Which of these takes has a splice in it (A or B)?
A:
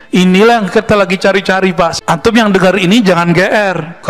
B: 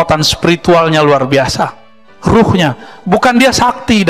A